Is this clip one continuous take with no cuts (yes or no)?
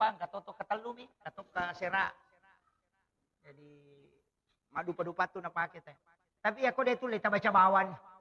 yes